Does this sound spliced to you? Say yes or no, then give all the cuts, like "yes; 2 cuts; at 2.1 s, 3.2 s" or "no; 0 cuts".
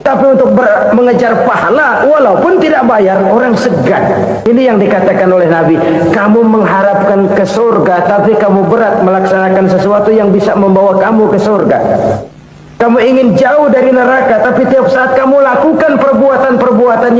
yes; 1 cut; at 4.4 s